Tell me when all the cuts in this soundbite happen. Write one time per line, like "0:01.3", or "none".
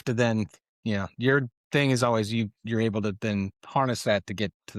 none